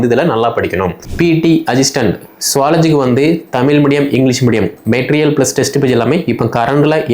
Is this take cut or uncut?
cut